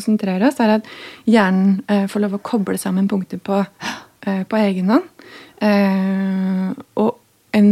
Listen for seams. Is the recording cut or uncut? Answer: uncut